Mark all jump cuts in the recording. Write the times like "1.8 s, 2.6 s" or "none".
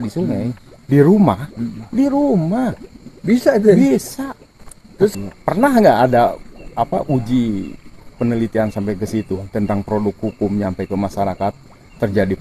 5.1 s

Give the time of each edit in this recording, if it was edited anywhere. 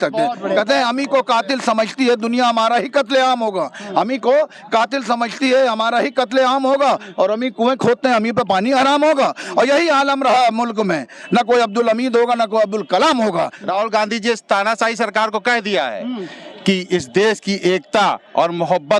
13.6 s

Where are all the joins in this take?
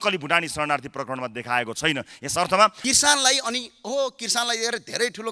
2.8 s

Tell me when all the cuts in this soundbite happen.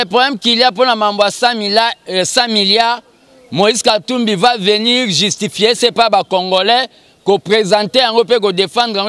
none

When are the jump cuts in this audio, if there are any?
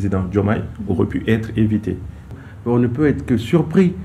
2.3 s

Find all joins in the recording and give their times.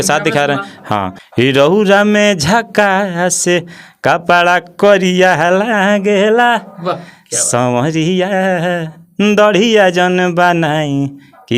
1.2 s

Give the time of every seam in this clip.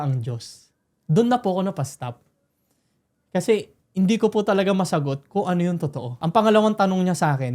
6.2 s

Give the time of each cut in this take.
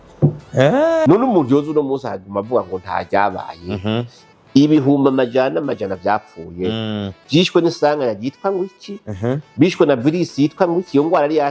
1.1 s

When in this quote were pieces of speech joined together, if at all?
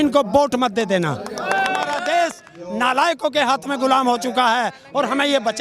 1.9 s

